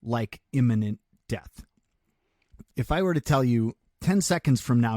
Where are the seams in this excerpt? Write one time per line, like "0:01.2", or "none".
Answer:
0:02.6
0:03.9